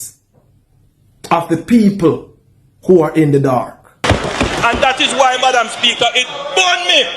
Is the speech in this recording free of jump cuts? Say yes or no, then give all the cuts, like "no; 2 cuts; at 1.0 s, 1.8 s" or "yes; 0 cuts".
no; 1 cut; at 4.0 s